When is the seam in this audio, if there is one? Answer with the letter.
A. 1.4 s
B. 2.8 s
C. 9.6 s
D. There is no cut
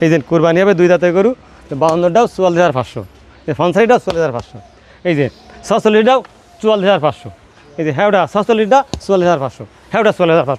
D